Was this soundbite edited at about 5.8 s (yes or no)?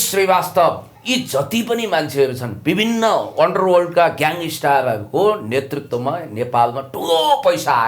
no